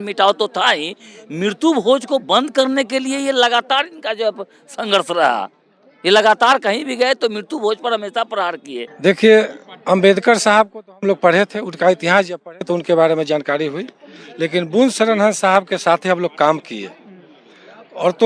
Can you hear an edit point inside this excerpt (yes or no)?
no